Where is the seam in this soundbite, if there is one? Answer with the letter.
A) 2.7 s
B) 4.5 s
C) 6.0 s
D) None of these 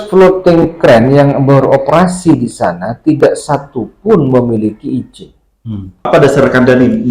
C